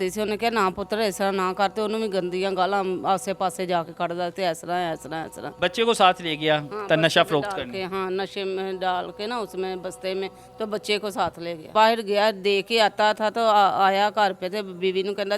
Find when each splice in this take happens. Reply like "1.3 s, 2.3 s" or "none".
5.4 s, 11.7 s